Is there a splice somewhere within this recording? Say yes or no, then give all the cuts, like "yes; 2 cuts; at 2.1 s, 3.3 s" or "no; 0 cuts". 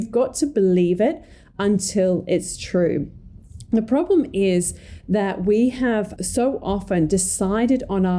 yes; 1 cut; at 6.1 s